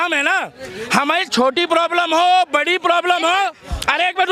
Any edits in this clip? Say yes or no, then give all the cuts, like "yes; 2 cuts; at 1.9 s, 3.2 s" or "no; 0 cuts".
no; 0 cuts